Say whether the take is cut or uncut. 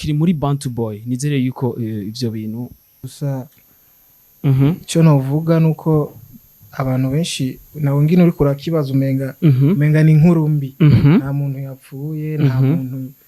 cut